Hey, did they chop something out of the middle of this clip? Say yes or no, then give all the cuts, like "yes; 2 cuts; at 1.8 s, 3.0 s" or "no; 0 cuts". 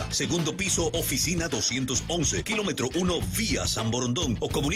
no; 0 cuts